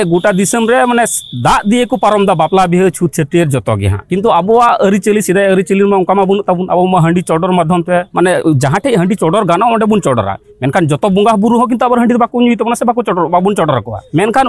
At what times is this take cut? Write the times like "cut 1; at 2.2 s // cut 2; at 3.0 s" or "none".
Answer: none